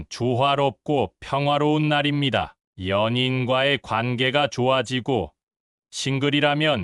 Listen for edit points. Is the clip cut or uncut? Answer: uncut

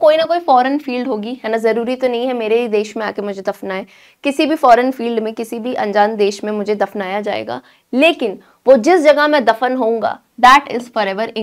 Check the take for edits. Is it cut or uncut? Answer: uncut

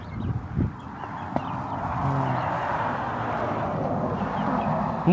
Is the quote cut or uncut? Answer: uncut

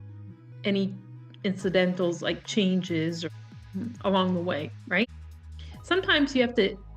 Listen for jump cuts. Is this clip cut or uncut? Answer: cut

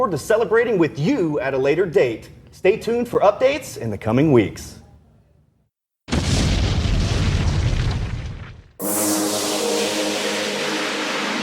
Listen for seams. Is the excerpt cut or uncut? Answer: cut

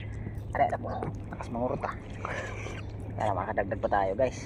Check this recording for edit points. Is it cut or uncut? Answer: uncut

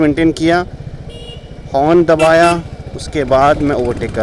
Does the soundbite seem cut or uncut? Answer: uncut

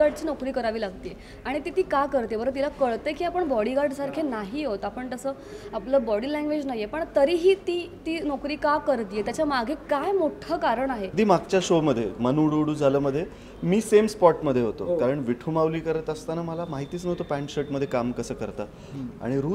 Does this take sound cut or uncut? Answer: cut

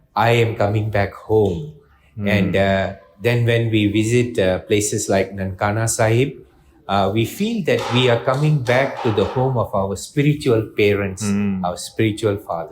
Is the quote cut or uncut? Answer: uncut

